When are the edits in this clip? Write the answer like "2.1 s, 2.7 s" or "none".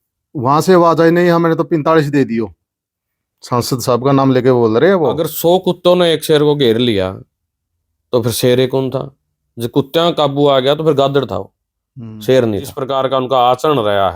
5.3 s, 12.8 s